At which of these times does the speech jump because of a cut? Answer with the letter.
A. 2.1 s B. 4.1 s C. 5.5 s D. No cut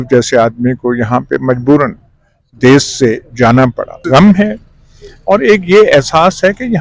B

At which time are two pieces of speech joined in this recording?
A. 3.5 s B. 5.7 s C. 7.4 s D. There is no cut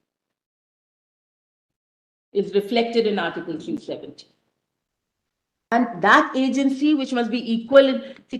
B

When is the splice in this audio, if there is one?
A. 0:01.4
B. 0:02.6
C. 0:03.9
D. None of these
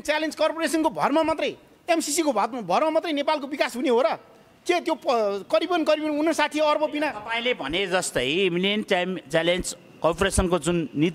D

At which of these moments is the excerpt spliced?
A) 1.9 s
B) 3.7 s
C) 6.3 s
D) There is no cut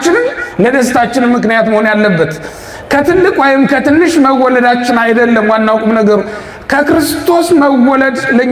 D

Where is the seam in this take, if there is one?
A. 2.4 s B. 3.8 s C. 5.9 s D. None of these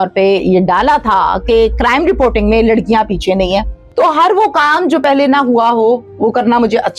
B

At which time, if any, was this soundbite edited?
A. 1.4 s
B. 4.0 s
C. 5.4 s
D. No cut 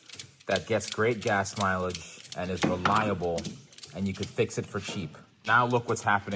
C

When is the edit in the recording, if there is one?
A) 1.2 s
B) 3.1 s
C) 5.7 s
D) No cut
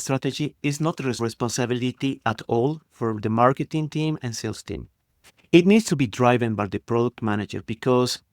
A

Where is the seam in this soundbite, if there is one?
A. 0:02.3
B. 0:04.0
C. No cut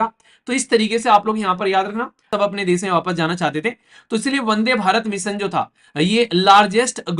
A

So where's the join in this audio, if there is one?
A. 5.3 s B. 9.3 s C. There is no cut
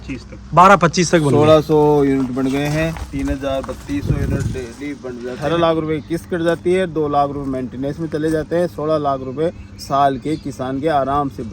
A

